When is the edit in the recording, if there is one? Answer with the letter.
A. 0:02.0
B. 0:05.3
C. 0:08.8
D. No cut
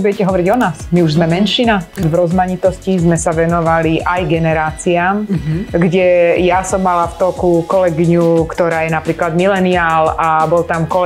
A